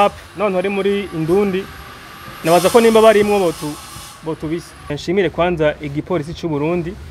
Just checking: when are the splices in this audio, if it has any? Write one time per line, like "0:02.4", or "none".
0:05.0